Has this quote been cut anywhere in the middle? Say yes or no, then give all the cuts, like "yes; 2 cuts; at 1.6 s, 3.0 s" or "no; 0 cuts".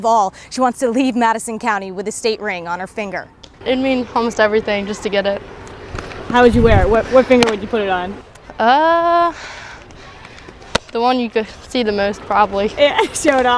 no; 0 cuts